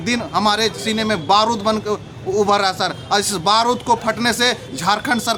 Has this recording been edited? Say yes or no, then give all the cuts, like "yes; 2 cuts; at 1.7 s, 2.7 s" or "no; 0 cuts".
no; 0 cuts